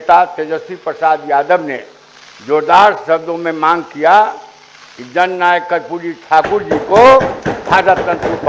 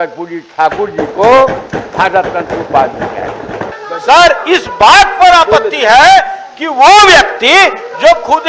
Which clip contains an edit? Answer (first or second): second